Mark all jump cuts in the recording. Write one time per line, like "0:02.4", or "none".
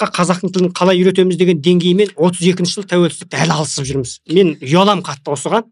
none